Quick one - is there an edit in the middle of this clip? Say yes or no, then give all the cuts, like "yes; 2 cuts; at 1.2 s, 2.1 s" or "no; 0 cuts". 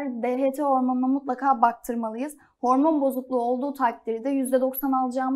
no; 0 cuts